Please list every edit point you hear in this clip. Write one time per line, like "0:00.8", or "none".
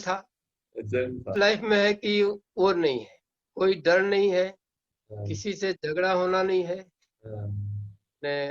0:01.3